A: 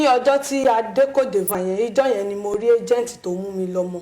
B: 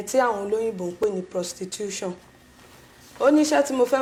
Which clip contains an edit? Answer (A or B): A